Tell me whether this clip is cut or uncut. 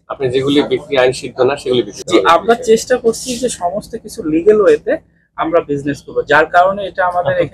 cut